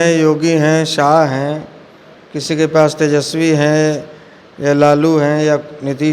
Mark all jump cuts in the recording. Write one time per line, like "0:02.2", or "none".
none